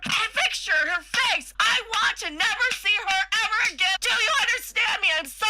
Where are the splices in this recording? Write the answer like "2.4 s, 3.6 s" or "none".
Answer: 1.5 s, 4.0 s